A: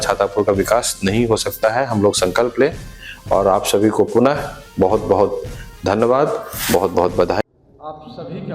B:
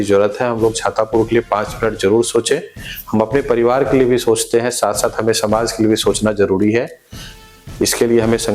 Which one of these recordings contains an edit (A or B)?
A